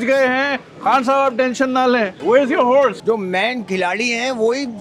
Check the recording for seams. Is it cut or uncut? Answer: cut